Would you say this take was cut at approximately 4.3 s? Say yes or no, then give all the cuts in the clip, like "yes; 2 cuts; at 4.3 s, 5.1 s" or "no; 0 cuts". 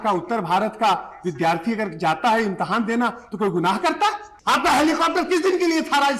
yes; 1 cut; at 4.3 s